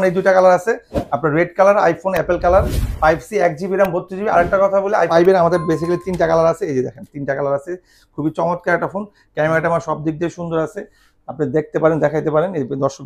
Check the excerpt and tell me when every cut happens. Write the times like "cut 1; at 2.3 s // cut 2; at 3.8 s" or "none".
cut 1; at 5.1 s